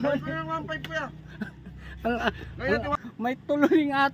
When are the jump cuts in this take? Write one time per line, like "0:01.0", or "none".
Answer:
0:02.9